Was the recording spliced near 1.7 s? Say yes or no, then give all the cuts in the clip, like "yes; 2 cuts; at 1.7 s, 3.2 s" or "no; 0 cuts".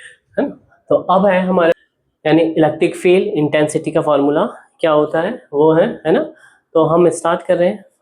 yes; 1 cut; at 1.7 s